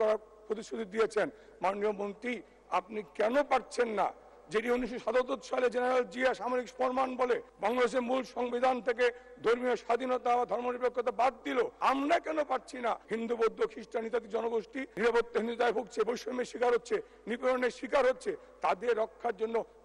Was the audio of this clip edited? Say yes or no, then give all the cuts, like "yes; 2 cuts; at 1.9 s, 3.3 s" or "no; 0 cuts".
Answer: yes; 4 cuts; at 7.5 s, 11.7 s, 13.0 s, 14.8 s